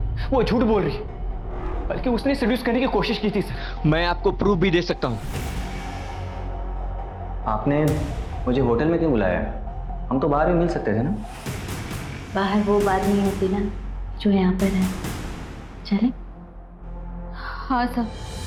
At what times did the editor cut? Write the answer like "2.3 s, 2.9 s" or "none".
none